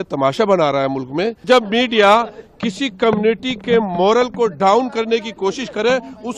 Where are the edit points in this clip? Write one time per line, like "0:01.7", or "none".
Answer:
0:01.4